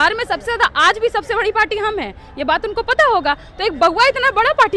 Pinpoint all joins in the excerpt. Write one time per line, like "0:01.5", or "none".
none